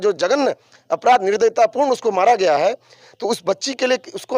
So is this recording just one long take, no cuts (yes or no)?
yes